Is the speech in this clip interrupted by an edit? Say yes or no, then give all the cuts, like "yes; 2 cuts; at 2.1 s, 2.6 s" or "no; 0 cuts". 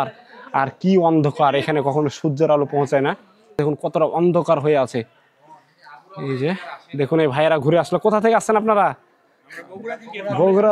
yes; 1 cut; at 3.5 s